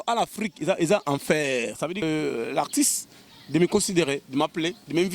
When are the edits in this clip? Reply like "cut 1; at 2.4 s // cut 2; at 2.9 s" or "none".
cut 1; at 2.0 s

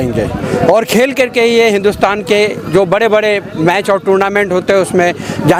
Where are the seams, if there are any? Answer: none

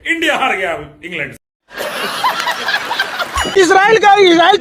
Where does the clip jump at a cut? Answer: cut 1; at 3.5 s

